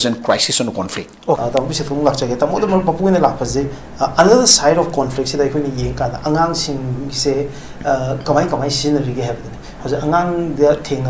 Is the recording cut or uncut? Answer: cut